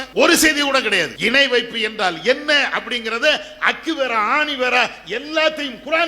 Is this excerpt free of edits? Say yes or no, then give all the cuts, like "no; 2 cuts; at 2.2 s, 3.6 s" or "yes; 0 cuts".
no; 1 cut; at 1.1 s